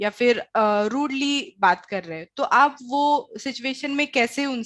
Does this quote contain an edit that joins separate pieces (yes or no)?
no